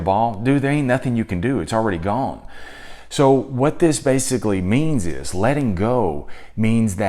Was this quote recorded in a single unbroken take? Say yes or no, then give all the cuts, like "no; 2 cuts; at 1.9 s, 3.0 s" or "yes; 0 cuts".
yes; 0 cuts